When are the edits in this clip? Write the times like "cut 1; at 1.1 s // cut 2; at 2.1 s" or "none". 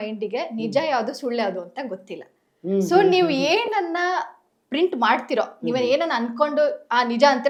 none